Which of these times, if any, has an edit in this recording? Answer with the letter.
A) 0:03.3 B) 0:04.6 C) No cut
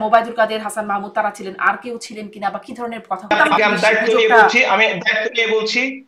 A